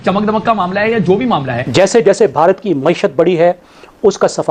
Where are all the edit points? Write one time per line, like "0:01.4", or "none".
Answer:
none